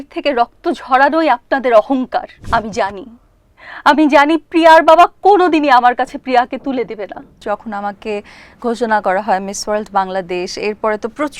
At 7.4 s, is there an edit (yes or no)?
yes